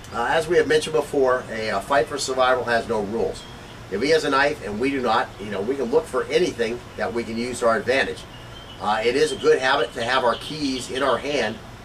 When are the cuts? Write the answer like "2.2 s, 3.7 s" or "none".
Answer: 10.3 s